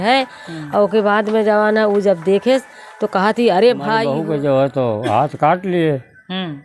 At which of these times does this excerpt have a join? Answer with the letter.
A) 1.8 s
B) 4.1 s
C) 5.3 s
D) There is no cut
B